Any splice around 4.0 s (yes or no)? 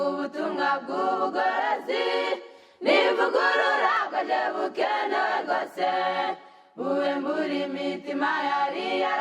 yes